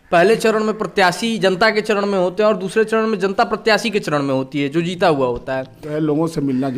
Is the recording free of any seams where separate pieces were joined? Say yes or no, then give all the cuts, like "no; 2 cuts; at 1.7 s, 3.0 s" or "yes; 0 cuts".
no; 1 cut; at 5.8 s